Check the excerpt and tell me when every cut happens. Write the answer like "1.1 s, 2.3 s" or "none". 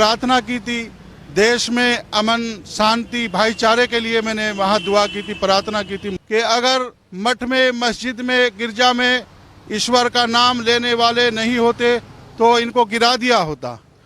6.1 s